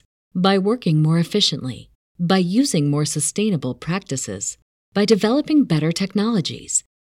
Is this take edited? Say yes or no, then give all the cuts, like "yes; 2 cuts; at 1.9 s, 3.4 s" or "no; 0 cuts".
no; 0 cuts